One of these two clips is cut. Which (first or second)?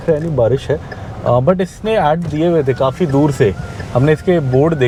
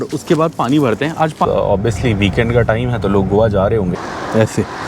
second